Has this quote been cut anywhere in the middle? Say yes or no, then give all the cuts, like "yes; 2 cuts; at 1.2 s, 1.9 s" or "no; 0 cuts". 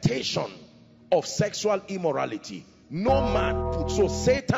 yes; 1 cut; at 3.7 s